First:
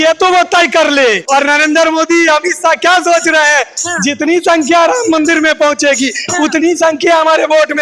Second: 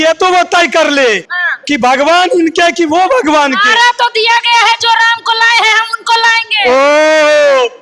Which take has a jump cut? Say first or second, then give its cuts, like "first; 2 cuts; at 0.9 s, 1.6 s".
first; 1 cut; at 1.2 s